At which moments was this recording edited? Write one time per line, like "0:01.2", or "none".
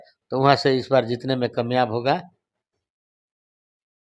none